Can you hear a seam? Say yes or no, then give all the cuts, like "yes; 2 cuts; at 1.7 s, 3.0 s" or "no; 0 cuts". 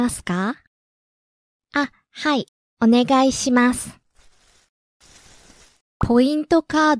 yes; 1 cut; at 6.0 s